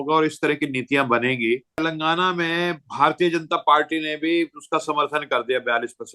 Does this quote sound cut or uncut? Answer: cut